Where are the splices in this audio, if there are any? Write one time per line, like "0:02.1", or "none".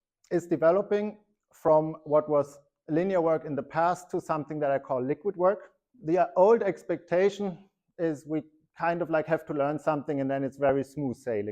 0:05.9